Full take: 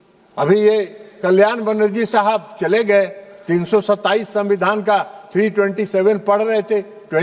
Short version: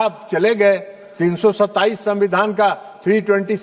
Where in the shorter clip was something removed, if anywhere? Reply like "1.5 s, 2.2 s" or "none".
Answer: none